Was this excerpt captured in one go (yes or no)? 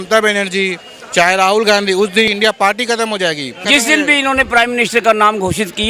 yes